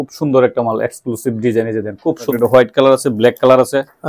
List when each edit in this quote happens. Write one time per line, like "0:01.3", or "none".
0:02.3